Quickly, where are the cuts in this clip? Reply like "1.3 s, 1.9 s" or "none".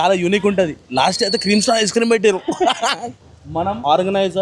3.5 s